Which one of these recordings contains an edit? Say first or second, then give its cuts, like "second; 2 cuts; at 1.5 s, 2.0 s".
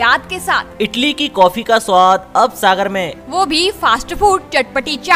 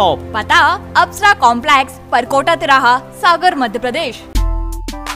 second; 1 cut; at 4.2 s